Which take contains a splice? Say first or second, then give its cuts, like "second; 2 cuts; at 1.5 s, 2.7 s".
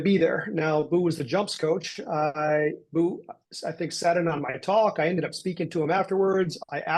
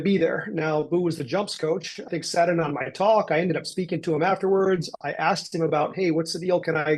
second; 1 cut; at 2.0 s